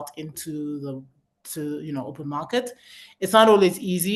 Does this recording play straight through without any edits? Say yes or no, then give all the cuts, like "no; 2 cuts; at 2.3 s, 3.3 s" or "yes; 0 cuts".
yes; 0 cuts